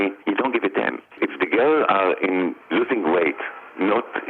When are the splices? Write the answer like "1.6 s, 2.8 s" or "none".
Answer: 1.1 s